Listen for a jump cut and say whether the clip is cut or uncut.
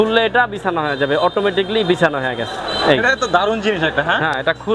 uncut